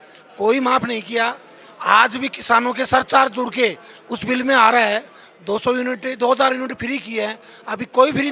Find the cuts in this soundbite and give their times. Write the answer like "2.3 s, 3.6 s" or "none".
none